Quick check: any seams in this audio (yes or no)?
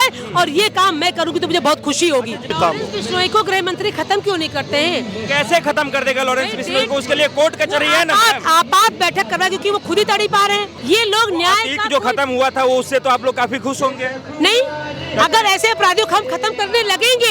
yes